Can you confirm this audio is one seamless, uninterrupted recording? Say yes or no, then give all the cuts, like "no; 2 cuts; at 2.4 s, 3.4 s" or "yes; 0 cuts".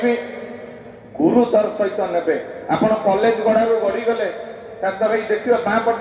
yes; 0 cuts